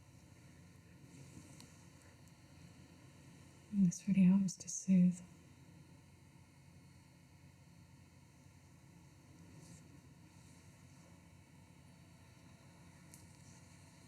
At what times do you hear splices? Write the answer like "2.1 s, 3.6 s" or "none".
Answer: none